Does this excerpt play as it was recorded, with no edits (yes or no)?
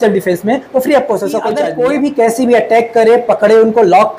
no